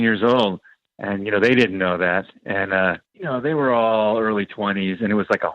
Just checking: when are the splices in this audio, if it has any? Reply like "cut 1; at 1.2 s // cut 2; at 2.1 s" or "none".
cut 1; at 3.1 s